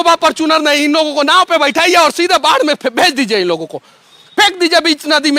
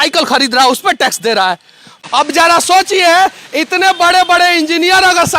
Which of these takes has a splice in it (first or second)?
second